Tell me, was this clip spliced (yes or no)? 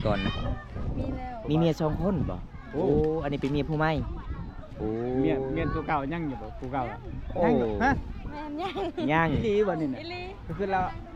no